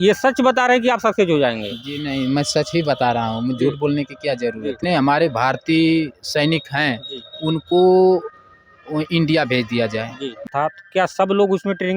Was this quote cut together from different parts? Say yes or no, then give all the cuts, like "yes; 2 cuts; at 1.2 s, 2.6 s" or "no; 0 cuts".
yes; 2 cuts; at 4.8 s, 10.5 s